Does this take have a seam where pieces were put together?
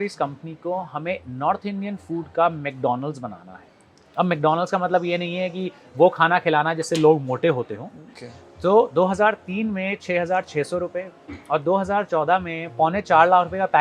yes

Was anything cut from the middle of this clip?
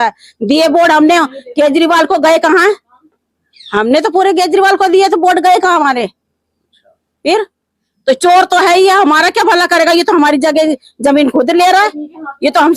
no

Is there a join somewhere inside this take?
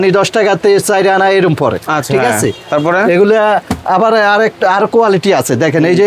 no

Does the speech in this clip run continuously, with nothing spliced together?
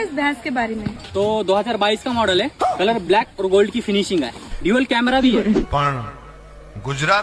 no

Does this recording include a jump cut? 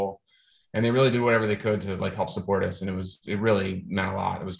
no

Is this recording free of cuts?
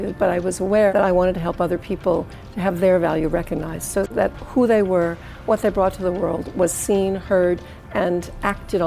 no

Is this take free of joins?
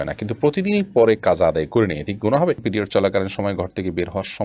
no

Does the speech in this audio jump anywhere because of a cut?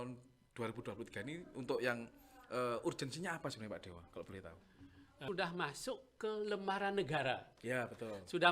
yes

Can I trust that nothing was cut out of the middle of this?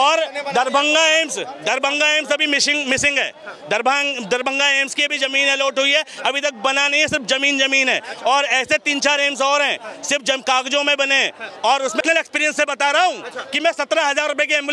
yes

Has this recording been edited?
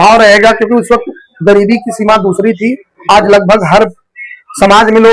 no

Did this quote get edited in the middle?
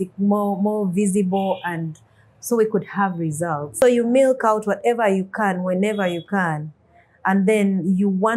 yes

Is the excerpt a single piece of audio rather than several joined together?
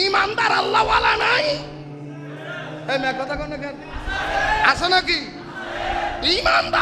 yes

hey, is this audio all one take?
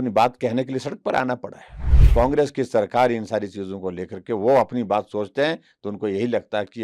no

